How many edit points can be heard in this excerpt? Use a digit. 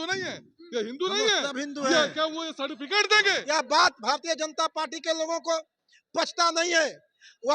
1